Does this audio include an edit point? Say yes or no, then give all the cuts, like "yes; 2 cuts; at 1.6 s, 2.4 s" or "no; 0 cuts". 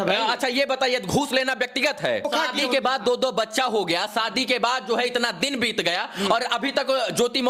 yes; 1 cut; at 2.3 s